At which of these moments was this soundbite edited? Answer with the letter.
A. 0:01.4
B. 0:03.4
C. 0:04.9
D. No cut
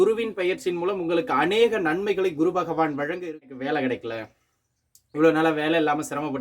B